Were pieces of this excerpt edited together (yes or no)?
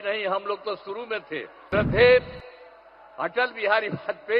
yes